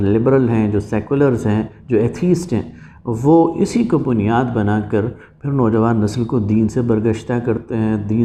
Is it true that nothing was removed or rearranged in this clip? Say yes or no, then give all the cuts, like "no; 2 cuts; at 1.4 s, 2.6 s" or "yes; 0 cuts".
yes; 0 cuts